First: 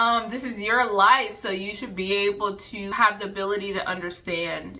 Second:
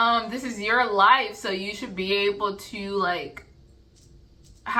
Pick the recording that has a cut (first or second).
first